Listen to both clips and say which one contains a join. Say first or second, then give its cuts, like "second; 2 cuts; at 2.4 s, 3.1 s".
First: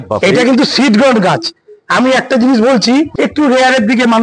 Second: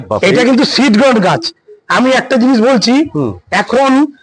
first; 1 cut; at 3.1 s